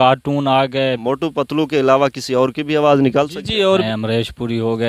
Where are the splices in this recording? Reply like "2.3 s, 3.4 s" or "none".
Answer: 1.0 s, 3.8 s